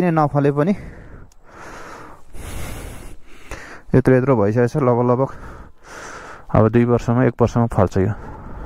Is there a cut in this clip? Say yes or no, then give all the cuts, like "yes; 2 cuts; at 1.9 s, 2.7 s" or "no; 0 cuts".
no; 0 cuts